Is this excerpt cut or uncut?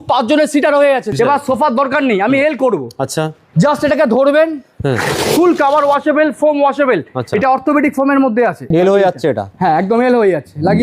cut